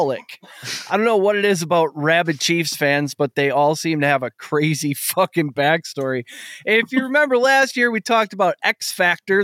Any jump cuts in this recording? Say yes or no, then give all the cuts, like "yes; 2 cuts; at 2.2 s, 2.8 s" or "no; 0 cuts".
no; 0 cuts